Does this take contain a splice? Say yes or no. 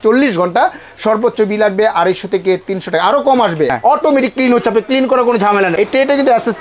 yes